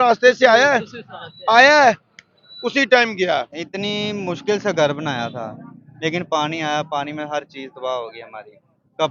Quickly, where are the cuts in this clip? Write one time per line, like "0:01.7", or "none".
0:03.6